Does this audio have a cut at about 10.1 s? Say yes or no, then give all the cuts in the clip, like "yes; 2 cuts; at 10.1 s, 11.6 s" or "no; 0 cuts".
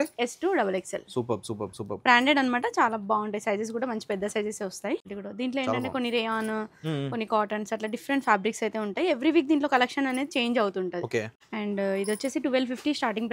no; 2 cuts; at 5.2 s, 11.4 s